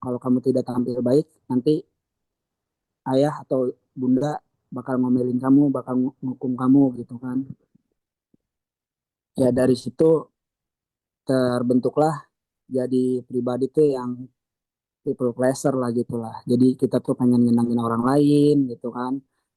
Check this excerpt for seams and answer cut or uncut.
uncut